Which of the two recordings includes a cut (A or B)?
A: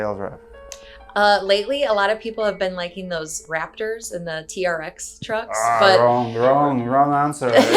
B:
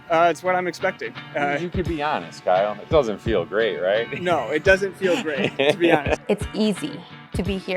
B